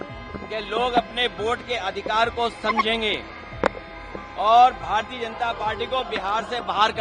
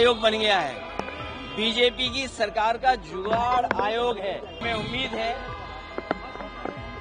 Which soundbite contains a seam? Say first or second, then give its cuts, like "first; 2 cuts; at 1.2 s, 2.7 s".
second; 1 cut; at 4.6 s